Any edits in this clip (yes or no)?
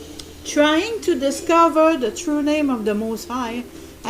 yes